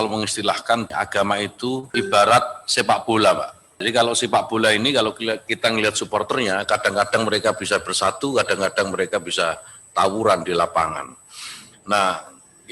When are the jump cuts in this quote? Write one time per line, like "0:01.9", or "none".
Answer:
0:00.9
0:01.9
0:03.8